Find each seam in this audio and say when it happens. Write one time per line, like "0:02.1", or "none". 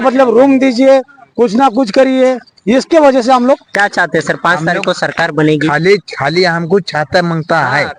none